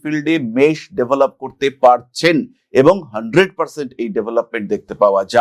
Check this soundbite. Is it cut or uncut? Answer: uncut